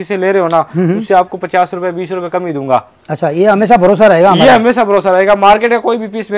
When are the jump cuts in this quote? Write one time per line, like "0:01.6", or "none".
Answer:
none

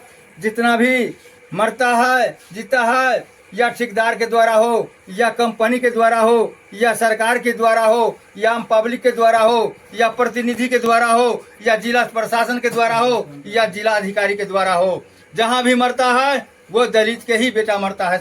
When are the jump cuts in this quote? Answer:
none

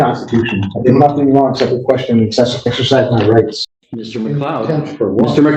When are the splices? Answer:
0:03.6

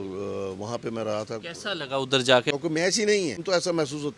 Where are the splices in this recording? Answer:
0:02.5
0:03.4

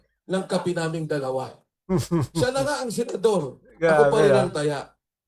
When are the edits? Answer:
none

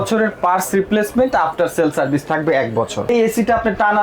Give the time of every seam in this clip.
0:03.1

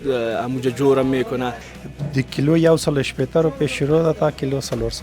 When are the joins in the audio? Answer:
0:01.6

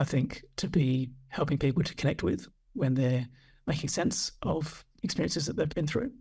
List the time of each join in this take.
0:01.2
0:02.6
0:04.8

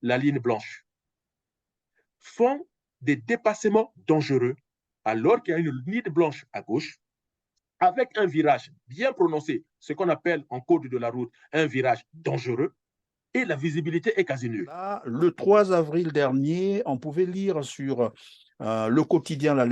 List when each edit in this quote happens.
0:15.1

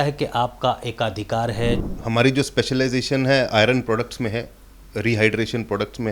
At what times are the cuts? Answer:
0:01.8

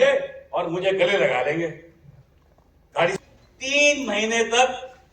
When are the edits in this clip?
0:03.1

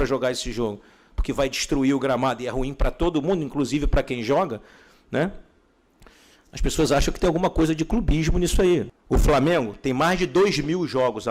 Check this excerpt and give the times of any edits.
0:08.9

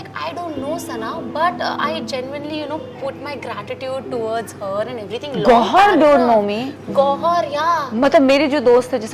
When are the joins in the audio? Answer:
none

